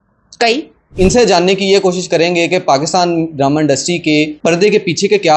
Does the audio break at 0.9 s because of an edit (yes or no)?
yes